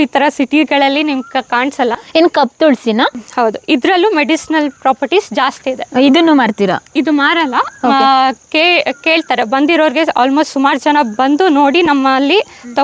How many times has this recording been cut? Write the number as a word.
zero